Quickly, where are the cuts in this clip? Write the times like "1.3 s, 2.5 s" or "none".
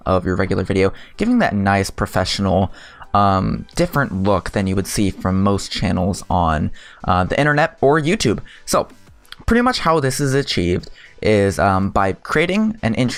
none